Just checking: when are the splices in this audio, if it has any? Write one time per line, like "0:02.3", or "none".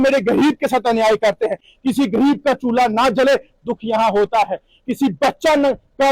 0:01.7